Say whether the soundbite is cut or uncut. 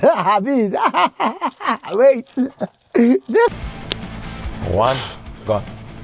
cut